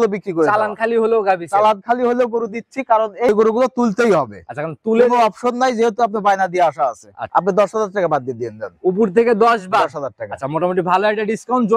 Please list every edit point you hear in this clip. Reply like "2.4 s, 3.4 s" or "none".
3.3 s, 7.2 s